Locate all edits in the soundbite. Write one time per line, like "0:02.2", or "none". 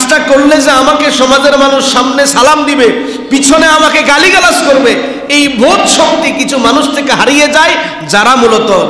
none